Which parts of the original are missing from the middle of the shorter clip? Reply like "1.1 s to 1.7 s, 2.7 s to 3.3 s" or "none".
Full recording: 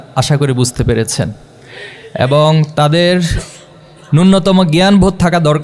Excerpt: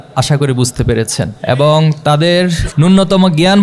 1.4 s to 2.1 s, 3.4 s to 4.0 s